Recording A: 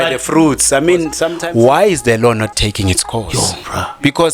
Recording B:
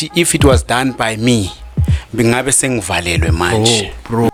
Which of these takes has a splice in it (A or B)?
A